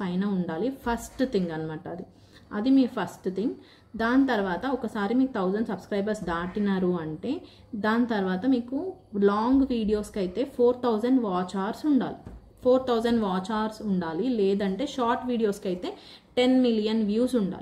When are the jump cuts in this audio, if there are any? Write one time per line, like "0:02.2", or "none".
none